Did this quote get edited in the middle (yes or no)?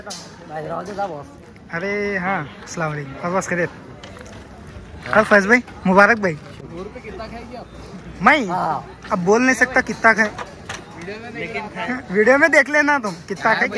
yes